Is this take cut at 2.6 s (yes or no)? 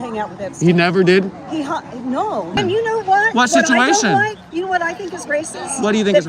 yes